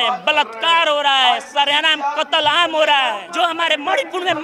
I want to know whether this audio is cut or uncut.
cut